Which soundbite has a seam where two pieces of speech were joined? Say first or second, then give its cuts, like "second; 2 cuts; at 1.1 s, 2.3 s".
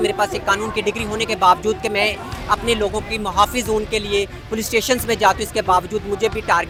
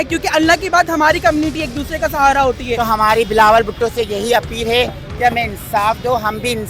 second; 1 cut; at 2.9 s